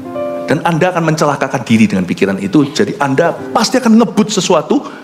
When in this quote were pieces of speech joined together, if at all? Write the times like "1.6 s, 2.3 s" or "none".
none